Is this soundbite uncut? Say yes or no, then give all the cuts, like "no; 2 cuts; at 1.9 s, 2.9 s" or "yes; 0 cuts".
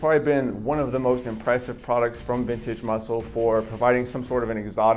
yes; 0 cuts